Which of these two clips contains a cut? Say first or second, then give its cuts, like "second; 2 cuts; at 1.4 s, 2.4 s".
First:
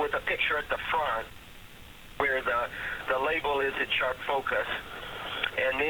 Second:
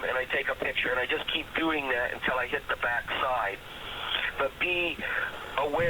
second; 1 cut; at 5.0 s